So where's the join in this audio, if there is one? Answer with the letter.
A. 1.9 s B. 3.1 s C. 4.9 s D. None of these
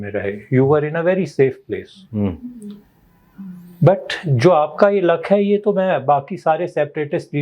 D